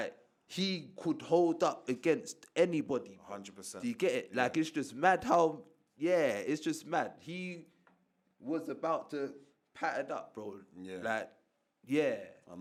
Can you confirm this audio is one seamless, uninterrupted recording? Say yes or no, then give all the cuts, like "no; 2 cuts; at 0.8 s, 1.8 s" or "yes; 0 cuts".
yes; 0 cuts